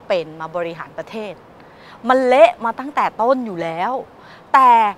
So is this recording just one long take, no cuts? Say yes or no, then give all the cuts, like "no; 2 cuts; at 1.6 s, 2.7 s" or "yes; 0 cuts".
yes; 0 cuts